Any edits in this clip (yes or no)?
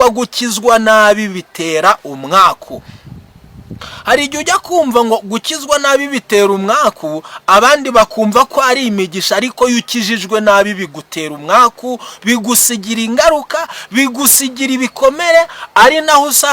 no